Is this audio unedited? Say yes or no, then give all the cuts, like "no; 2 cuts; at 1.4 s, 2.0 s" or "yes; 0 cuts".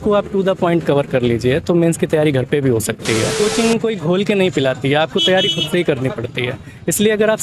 no; 1 cut; at 3.3 s